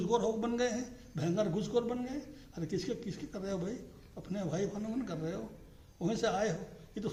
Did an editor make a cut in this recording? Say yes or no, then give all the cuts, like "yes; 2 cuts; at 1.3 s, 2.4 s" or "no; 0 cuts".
no; 0 cuts